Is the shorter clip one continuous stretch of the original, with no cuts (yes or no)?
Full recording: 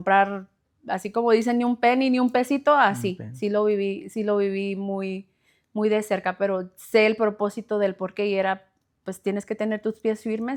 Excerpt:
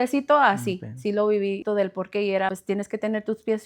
no